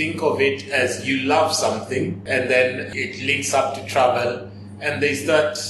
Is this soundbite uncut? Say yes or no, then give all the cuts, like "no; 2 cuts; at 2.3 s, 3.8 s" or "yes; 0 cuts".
no; 2 cuts; at 2.2 s, 2.8 s